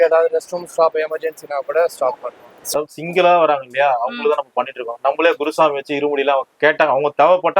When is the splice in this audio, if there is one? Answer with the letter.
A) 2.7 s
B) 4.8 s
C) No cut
A